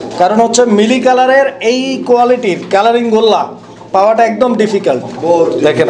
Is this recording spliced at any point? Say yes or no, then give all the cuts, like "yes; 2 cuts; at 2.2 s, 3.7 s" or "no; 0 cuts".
no; 0 cuts